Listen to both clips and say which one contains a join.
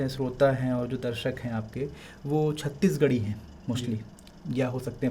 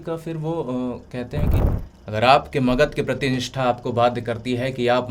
second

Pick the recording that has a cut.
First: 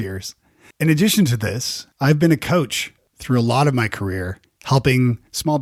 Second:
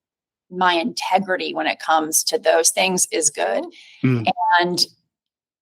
second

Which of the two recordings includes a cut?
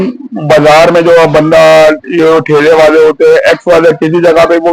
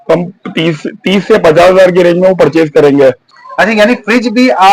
second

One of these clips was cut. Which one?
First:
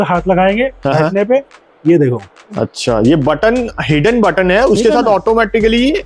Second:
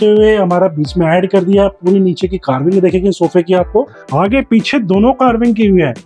second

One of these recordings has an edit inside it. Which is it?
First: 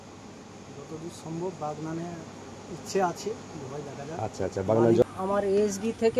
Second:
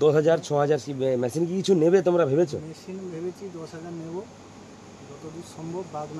first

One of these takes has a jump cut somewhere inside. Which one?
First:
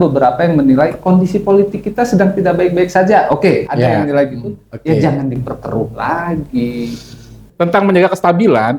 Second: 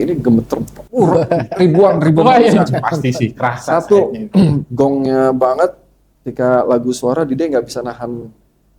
first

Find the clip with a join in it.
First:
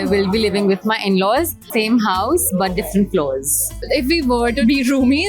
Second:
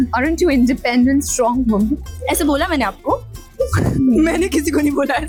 first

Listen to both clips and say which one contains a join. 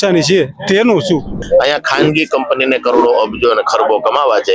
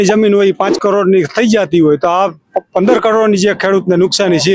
first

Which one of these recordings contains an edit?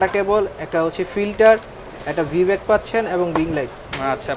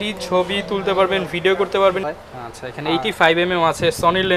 second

